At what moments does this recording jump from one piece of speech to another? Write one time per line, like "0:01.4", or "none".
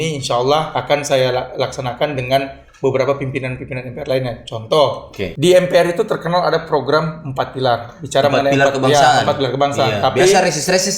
0:05.3